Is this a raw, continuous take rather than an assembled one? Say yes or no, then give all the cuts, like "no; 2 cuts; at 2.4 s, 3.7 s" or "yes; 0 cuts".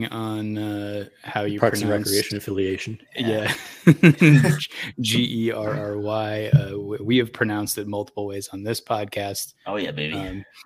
yes; 0 cuts